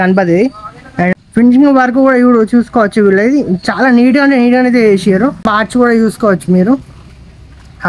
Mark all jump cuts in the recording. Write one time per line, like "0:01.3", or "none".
0:01.1
0:05.5